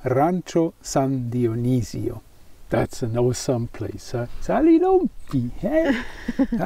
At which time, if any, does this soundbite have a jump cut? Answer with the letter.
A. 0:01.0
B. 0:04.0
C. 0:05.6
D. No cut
D